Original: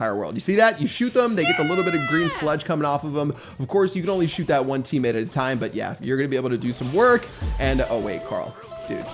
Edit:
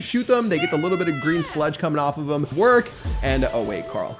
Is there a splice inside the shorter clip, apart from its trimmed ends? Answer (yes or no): yes